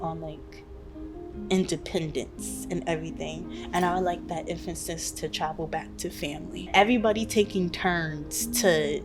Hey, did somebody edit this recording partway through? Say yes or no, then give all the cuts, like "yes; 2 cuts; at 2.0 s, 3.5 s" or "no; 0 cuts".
yes; 1 cut; at 6.7 s